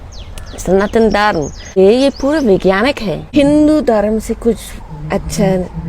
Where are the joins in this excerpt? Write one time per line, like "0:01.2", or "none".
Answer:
0:01.8
0:03.1